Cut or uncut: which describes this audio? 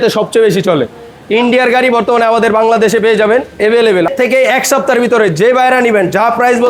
cut